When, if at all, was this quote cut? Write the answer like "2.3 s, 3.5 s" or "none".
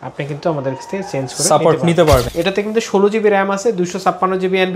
2.3 s